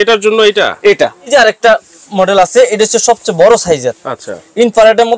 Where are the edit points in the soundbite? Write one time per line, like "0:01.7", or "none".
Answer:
0:01.3